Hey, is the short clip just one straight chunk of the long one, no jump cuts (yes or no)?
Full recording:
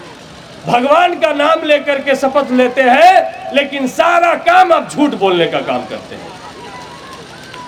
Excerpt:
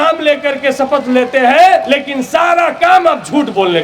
no